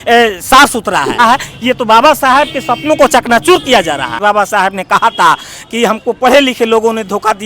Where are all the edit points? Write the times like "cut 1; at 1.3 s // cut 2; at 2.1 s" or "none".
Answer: cut 1; at 1.2 s // cut 2; at 4.2 s